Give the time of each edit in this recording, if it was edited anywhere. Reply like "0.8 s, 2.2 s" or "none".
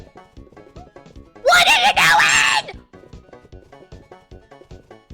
none